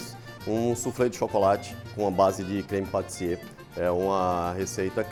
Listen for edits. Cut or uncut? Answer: uncut